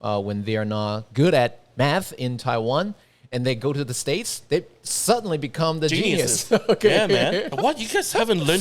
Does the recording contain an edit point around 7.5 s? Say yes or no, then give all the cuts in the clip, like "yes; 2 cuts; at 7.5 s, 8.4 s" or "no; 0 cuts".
yes; 1 cut; at 7.5 s